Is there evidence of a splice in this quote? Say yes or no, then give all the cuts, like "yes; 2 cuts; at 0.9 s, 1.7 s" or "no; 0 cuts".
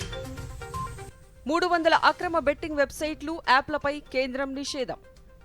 yes; 1 cut; at 0.9 s